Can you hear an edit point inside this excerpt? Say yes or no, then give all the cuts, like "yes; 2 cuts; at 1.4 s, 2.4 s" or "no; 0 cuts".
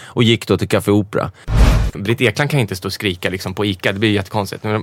yes; 1 cut; at 1.7 s